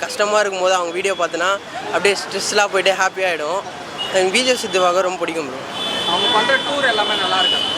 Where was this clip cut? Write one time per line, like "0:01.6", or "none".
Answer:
none